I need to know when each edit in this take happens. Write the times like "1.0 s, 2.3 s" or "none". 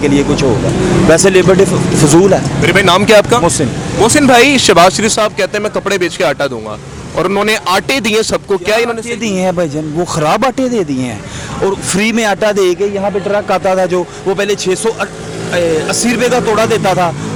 none

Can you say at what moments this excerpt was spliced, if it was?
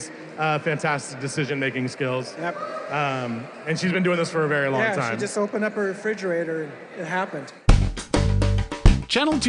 7.5 s

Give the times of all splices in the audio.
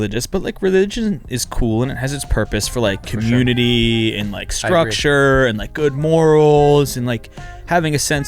none

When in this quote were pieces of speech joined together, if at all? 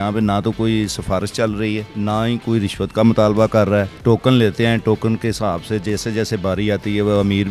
1.9 s, 3.9 s

